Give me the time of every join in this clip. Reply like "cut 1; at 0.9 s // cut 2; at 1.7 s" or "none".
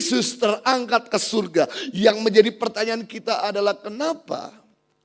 none